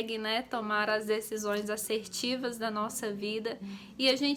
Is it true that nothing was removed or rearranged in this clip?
yes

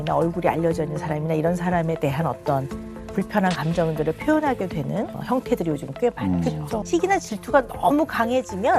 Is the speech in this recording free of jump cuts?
no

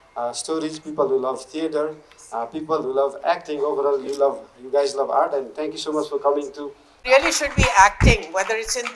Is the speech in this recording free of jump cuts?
no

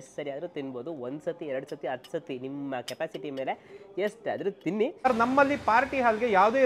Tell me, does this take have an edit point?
yes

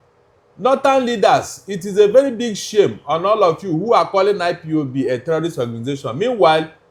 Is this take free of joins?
yes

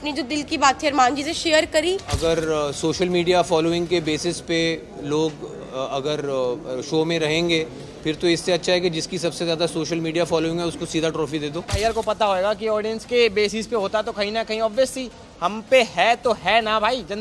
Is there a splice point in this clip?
yes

